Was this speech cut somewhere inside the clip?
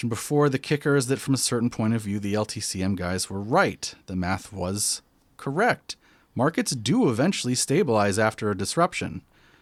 no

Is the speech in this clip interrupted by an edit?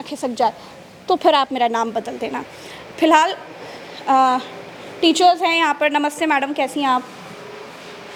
no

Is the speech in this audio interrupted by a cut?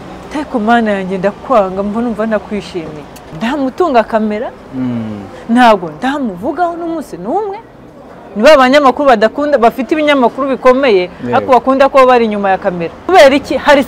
yes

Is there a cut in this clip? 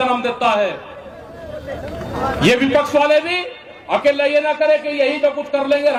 no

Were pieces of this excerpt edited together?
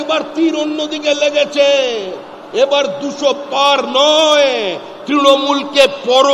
no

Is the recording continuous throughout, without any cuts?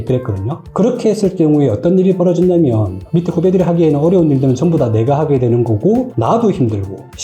no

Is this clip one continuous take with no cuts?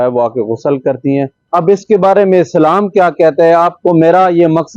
no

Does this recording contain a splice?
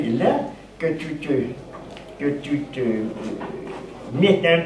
yes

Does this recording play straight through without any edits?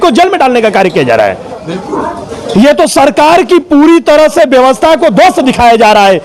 yes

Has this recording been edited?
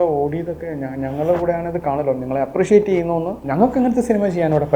yes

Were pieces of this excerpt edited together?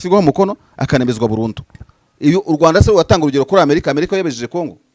no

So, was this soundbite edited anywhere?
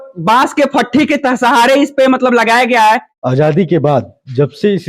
yes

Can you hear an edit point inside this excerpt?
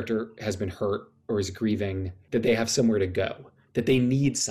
yes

